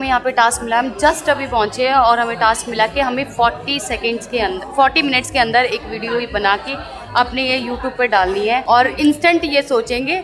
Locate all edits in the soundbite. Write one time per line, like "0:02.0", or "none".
none